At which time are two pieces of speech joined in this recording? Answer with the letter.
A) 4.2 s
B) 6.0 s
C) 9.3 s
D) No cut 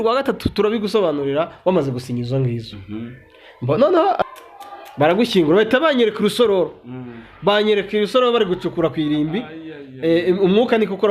A